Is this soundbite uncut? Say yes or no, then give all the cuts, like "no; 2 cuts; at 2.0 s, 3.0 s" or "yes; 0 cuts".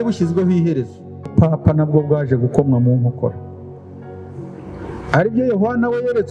no; 1 cut; at 1.3 s